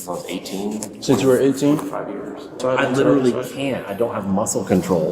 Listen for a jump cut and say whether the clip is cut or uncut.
cut